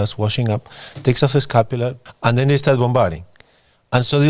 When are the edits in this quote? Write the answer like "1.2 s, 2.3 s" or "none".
2.0 s